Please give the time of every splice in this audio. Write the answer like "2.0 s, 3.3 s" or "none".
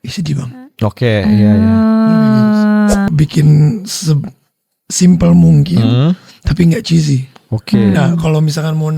3.1 s